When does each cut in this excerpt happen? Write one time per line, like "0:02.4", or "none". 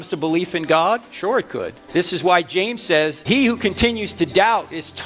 0:01.8
0:03.2